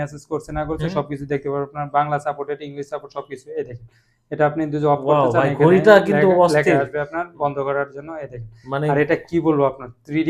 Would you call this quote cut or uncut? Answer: uncut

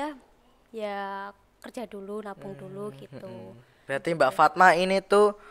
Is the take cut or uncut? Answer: cut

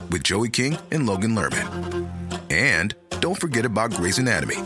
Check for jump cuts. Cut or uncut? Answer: uncut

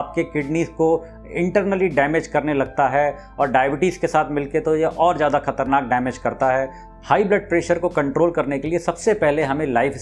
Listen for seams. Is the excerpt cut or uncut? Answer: cut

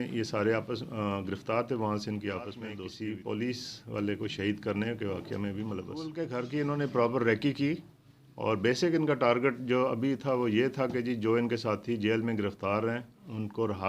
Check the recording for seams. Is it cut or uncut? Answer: cut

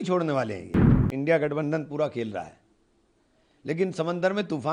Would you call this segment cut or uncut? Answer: cut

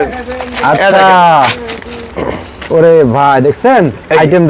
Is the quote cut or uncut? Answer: uncut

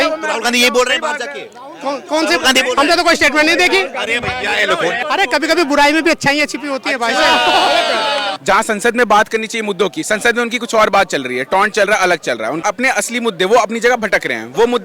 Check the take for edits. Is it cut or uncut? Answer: cut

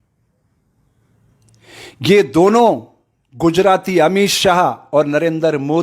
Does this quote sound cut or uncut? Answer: uncut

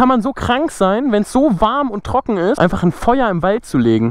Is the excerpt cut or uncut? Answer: uncut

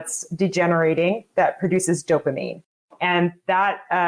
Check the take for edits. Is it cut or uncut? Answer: uncut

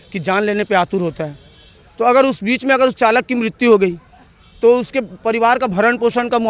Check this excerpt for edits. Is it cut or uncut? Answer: uncut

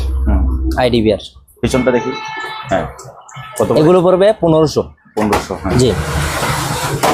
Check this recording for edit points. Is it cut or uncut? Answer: uncut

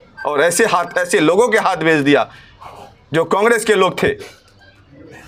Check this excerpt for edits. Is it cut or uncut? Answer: uncut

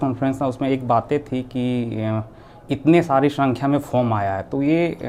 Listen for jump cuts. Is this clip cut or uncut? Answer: uncut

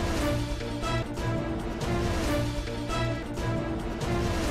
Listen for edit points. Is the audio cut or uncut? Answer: uncut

